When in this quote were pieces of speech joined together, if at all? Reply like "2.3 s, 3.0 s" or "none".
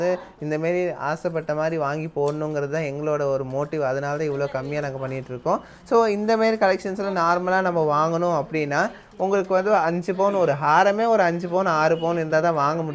none